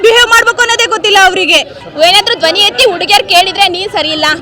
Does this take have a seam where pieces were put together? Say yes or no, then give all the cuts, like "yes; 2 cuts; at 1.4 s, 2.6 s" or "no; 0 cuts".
yes; 1 cut; at 1.8 s